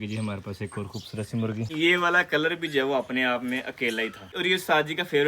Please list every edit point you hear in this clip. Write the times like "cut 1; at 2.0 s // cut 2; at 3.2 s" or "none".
cut 1; at 1.7 s // cut 2; at 4.3 s